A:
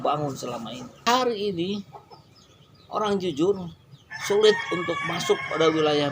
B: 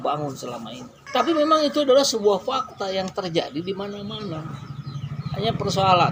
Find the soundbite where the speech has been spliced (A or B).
A